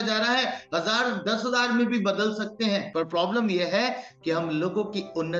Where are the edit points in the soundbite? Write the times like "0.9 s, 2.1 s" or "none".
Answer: 2.9 s